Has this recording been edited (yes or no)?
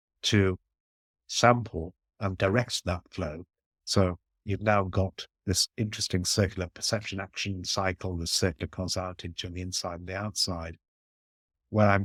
no